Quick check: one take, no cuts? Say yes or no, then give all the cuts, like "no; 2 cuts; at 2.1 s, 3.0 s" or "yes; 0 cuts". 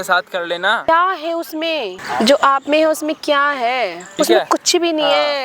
no; 3 cuts; at 0.8 s, 2.0 s, 4.0 s